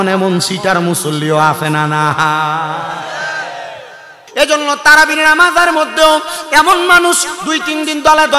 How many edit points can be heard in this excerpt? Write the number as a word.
one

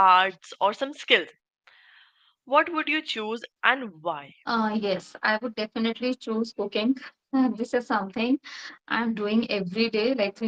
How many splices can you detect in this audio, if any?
one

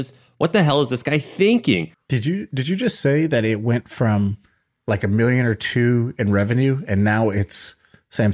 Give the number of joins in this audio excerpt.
one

